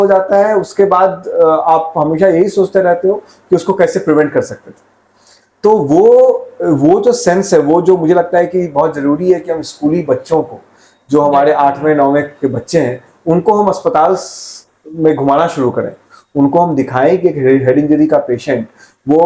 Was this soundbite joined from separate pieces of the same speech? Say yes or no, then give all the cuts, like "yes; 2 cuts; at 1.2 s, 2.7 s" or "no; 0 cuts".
no; 0 cuts